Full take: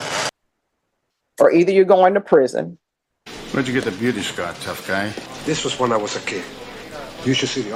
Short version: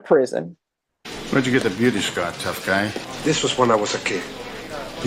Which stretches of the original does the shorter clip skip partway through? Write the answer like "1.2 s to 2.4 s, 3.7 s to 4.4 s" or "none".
none